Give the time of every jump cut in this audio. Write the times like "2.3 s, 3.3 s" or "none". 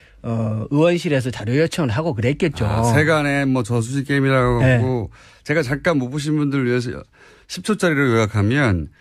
none